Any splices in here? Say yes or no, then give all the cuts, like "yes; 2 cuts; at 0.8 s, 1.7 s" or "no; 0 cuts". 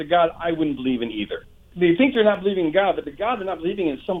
yes; 1 cut; at 1.7 s